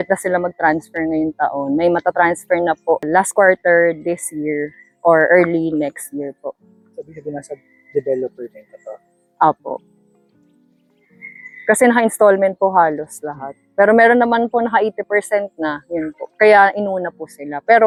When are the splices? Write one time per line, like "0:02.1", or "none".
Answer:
none